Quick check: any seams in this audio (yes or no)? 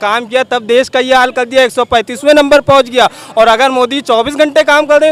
no